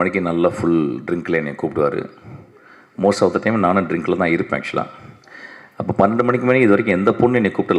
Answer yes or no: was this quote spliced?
no